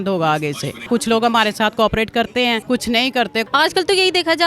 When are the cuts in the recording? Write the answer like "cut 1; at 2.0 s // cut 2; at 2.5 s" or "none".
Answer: cut 1; at 0.9 s // cut 2; at 2.6 s // cut 3; at 3.4 s